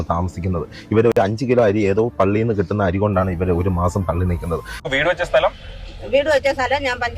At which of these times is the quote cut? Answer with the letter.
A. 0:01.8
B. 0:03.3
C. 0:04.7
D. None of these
C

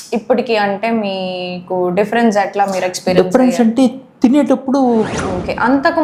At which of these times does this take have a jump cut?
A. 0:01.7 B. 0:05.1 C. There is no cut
B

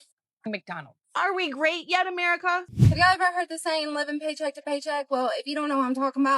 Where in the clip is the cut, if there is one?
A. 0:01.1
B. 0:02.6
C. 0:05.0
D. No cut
B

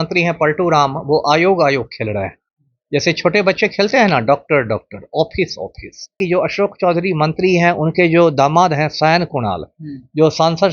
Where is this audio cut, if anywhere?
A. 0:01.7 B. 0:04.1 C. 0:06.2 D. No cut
C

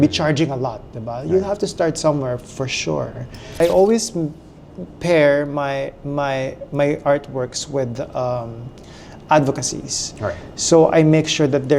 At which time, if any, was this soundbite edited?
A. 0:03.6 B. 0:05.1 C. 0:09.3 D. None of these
A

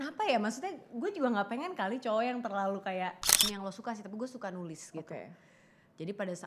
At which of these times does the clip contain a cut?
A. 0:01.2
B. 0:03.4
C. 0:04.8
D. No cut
B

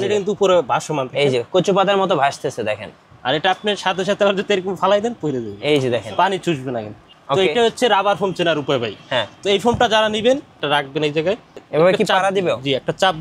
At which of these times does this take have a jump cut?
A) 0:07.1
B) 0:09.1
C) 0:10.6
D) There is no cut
C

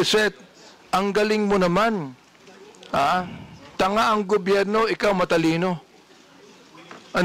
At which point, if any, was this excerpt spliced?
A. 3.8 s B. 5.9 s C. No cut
C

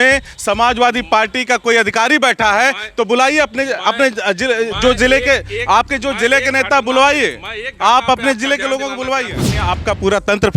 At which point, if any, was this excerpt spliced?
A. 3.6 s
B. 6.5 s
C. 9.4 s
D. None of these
C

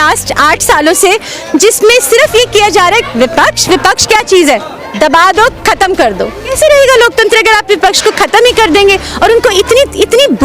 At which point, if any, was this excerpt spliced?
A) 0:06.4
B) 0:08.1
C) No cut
A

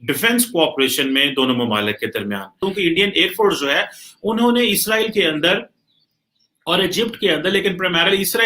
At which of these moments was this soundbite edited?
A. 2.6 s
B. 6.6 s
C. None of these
A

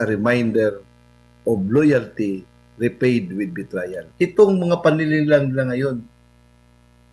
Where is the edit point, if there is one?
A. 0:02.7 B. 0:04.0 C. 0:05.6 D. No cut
B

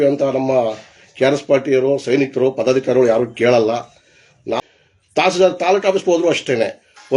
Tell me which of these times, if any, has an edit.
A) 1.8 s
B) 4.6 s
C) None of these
B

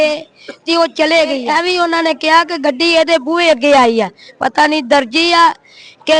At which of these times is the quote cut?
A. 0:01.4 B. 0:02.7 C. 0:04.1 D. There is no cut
A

